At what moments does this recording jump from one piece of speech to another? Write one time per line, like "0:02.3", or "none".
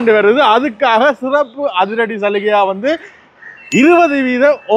none